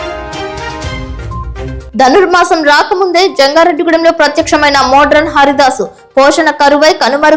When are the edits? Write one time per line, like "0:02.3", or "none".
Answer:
0:01.1